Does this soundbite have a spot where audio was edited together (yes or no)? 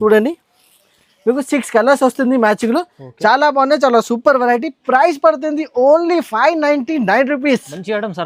no